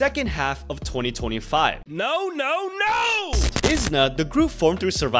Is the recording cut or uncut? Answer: cut